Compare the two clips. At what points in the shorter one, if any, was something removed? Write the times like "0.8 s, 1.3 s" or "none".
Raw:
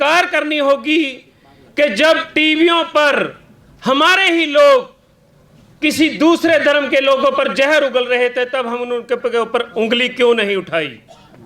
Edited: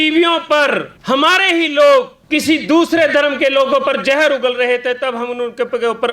0.9 s, 2.2 s